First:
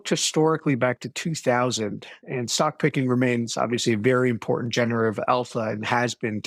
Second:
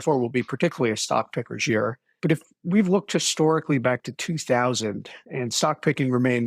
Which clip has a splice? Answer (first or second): second